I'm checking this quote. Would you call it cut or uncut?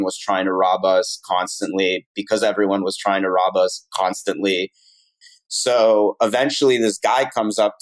cut